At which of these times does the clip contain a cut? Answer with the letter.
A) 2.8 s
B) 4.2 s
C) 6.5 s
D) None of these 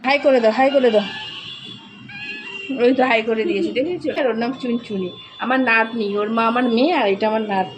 B